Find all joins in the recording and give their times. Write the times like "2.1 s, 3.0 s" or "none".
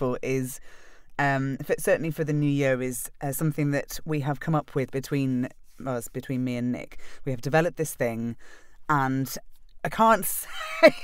none

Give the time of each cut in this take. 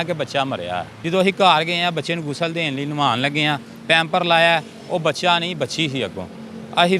0.9 s

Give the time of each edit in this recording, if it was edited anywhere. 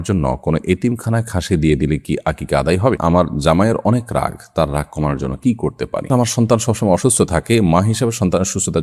3.0 s, 6.1 s

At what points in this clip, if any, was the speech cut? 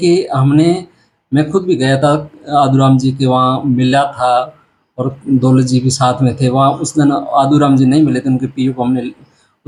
none

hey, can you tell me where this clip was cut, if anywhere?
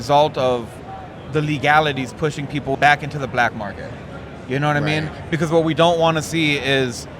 2.7 s

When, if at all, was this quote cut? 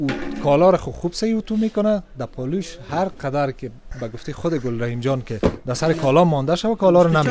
none

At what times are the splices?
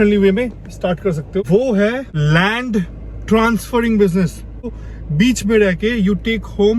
1.4 s, 2.1 s, 4.8 s

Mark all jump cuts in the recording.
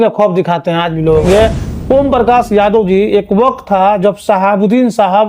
1.2 s

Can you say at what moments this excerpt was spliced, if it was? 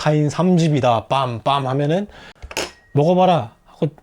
2.3 s

